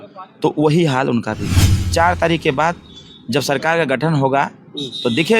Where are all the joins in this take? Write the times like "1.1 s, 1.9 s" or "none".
1.6 s